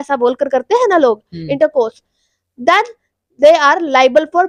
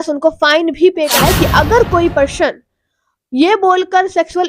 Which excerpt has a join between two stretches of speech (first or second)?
second